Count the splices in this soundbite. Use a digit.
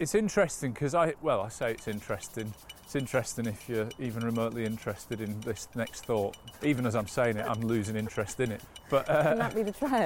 2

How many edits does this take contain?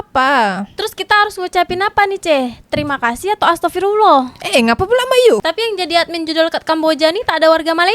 1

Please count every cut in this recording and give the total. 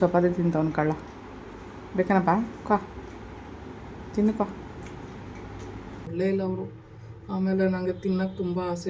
1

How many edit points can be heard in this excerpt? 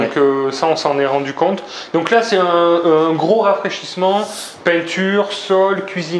0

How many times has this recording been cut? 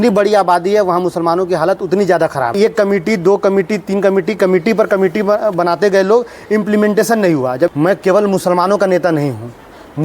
2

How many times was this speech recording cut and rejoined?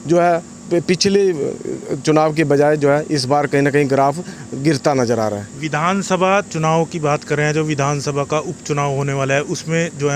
0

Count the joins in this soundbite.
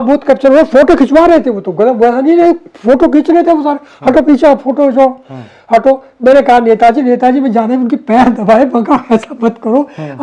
0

